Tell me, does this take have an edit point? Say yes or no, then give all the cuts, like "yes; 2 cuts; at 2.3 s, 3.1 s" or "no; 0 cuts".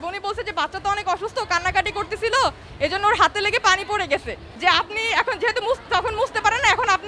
yes; 1 cut; at 4.5 s